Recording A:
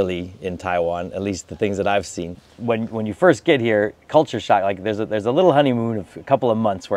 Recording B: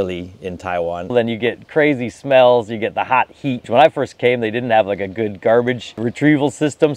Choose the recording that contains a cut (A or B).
B